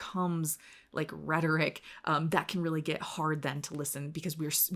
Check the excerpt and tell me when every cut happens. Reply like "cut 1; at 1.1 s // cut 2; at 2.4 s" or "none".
none